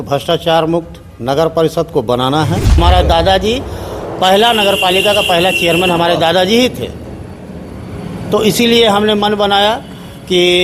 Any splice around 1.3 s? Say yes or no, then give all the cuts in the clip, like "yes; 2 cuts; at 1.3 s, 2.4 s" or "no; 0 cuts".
no; 1 cut; at 2.8 s